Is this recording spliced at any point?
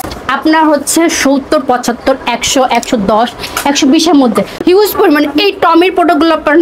yes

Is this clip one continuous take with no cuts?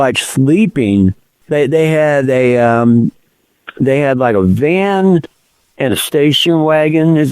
no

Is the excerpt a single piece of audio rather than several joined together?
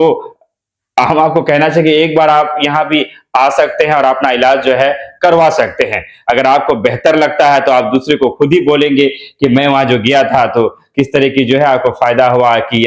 yes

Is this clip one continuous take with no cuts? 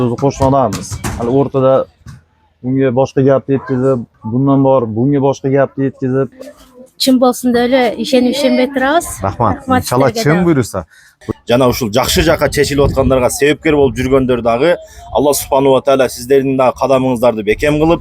no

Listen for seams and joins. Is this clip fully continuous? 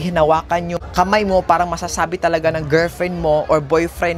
yes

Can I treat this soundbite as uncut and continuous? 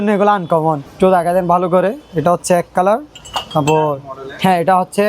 no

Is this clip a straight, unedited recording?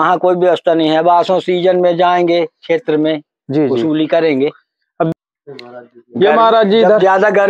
no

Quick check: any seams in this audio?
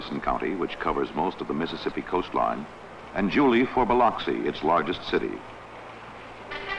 no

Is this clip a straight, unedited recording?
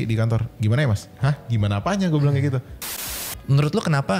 no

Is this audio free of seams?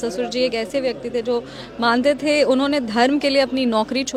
yes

